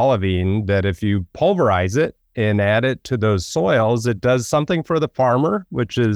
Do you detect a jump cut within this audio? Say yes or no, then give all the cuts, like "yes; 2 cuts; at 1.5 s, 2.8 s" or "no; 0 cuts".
no; 0 cuts